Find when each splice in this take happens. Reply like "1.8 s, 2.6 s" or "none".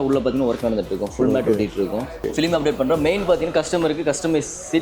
2.2 s